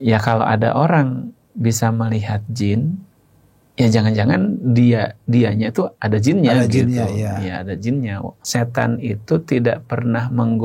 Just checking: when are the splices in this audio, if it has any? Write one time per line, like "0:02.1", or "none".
0:08.3